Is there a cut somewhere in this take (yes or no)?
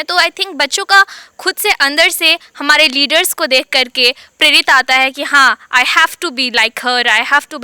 no